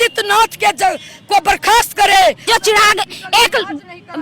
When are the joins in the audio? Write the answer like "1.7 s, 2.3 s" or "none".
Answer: 2.5 s